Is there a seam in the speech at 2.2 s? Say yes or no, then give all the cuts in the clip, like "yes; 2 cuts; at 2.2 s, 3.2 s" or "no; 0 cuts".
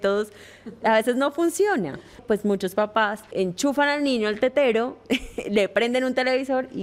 yes; 2 cuts; at 2.2 s, 3.3 s